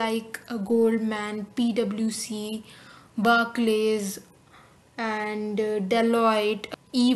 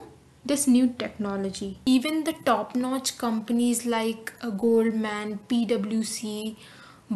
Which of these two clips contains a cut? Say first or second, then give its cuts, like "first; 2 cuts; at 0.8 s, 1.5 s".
second; 1 cut; at 1.7 s